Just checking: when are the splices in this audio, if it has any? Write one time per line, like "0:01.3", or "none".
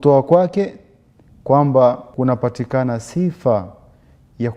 0:02.1